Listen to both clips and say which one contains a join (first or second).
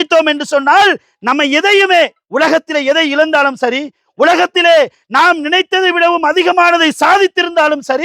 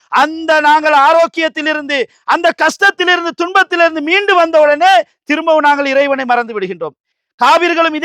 second